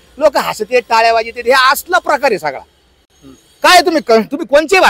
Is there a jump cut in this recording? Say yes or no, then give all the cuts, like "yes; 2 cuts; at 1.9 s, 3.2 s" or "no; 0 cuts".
no; 0 cuts